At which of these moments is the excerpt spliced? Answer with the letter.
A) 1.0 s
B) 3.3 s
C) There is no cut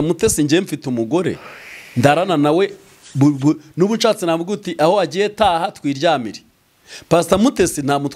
C